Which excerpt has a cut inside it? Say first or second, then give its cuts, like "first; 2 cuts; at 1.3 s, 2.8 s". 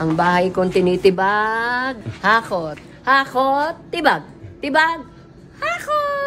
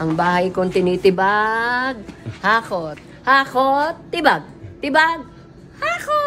first; 1 cut; at 2.1 s